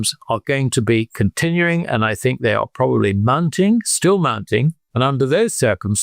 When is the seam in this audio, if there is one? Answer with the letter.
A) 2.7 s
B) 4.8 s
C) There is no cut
B